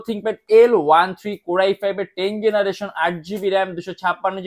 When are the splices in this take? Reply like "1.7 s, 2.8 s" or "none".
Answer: none